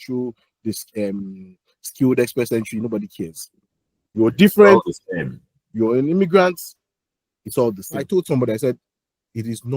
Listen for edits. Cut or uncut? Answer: cut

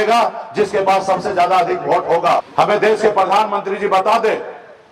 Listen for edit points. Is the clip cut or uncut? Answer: cut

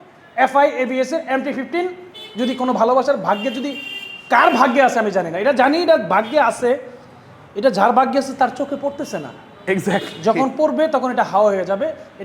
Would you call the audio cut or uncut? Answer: uncut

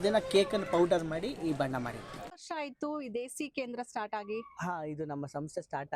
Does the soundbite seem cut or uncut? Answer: cut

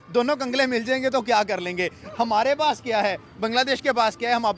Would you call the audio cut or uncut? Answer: uncut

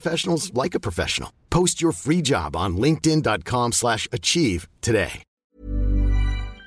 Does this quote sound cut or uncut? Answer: cut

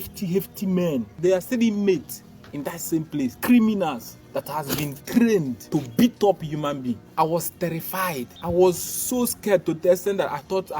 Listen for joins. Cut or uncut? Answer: cut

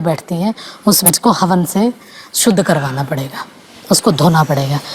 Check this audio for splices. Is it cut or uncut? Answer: cut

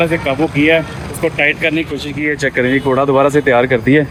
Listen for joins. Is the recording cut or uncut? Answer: uncut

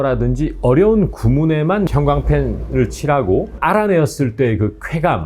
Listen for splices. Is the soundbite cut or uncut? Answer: cut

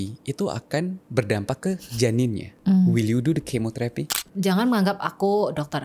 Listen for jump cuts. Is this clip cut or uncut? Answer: cut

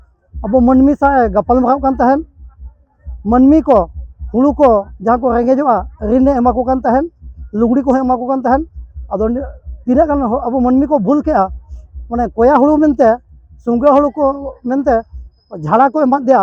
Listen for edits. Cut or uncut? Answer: uncut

